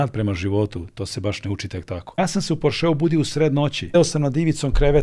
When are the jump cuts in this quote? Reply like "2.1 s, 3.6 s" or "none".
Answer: 2.2 s, 3.9 s